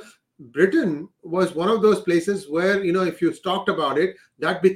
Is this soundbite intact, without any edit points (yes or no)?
yes